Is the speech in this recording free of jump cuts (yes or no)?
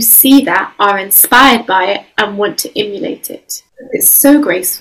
no